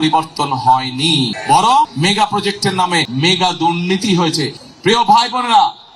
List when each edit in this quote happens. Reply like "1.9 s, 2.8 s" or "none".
1.4 s, 1.9 s, 3.1 s, 4.6 s